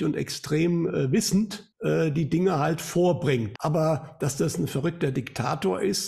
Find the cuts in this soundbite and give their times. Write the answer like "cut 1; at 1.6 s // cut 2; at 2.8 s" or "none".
cut 1; at 1.7 s // cut 2; at 3.5 s